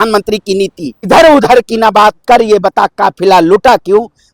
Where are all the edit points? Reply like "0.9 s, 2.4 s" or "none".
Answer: 1.0 s